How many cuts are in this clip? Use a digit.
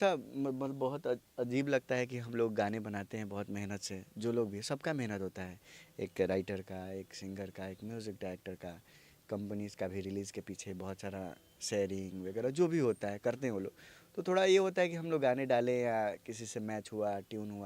0